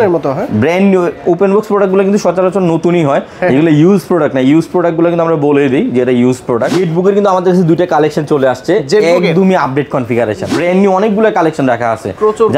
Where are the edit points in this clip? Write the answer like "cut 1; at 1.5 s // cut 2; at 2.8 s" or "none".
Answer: cut 1; at 6.8 s // cut 2; at 10.5 s